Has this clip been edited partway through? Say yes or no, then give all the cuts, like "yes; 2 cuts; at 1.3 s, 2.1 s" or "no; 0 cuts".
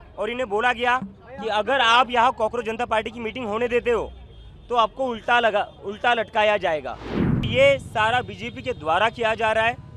yes; 1 cut; at 7.5 s